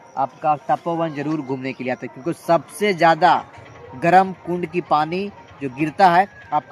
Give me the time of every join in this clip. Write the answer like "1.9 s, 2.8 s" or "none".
none

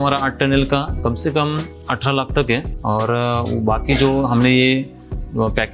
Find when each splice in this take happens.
1.8 s, 2.7 s

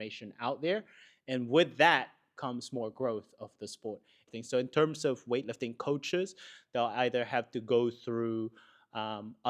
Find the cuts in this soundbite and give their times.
4.3 s

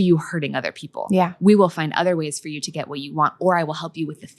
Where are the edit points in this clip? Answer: none

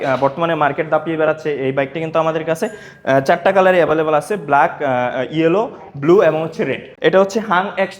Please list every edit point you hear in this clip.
6.8 s

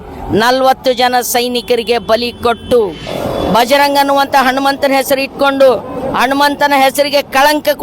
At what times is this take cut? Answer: 3.0 s

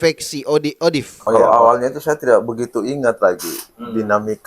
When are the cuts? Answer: 1.4 s

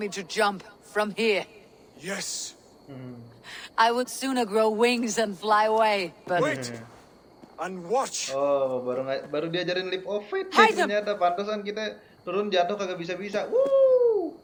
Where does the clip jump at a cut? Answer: none

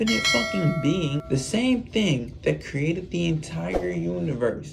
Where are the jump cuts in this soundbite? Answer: 1.2 s

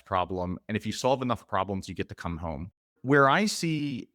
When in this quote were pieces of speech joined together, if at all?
2.9 s

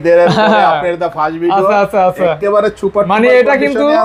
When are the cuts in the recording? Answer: none

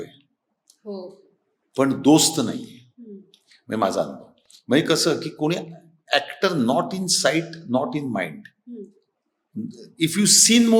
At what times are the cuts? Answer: none

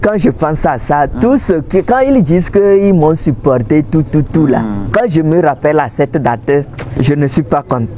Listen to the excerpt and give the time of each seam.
4.8 s, 6.8 s

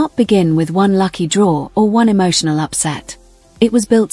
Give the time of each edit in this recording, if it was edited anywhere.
1.0 s

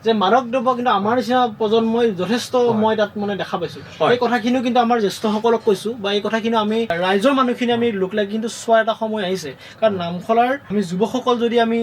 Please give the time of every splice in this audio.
6.9 s, 10.7 s

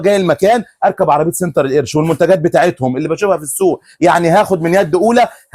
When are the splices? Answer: none

